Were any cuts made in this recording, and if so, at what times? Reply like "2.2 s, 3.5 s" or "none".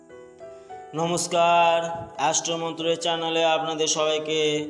0.9 s